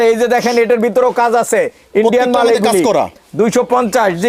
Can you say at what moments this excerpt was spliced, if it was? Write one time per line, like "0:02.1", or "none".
none